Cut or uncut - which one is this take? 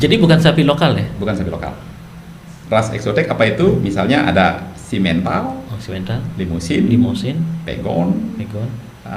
uncut